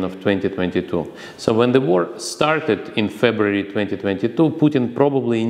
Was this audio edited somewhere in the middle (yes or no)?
no